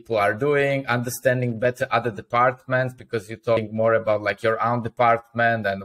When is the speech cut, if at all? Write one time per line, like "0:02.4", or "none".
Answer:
0:03.6

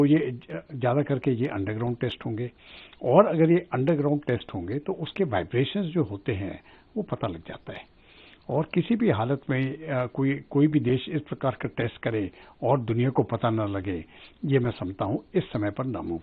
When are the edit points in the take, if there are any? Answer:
none

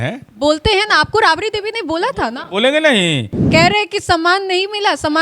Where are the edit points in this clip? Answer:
0:03.4

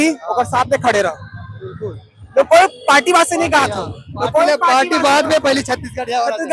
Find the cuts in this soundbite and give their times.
none

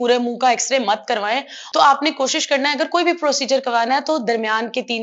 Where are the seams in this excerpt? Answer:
0:01.5

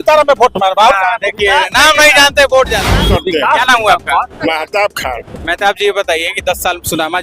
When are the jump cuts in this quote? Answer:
0:03.0

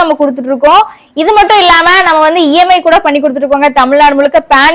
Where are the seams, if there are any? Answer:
none

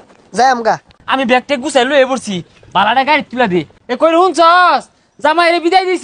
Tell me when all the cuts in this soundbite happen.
0:00.9
0:03.7

